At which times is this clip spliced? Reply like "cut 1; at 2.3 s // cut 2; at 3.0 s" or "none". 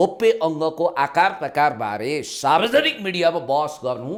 none